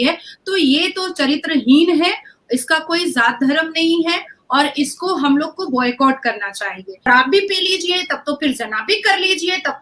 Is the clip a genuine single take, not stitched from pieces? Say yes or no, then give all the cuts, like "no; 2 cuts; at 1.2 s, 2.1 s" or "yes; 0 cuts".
no; 1 cut; at 7.1 s